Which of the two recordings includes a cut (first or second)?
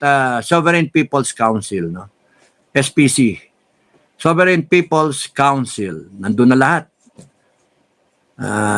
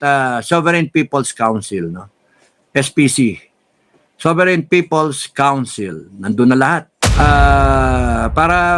second